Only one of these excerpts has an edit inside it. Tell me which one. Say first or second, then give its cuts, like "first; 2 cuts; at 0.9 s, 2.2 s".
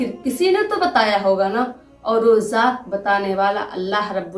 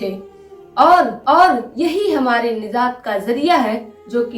second; 1 cut; at 1.2 s